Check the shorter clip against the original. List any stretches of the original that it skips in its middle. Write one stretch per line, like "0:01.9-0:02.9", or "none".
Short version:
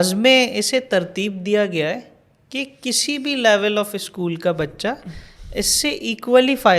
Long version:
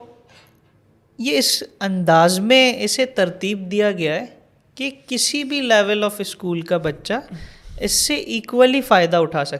none